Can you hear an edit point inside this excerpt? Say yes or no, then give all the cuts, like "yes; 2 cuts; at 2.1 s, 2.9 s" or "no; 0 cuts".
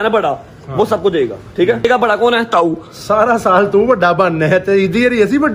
yes; 1 cut; at 1.8 s